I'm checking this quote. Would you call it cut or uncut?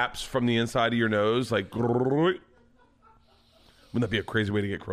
uncut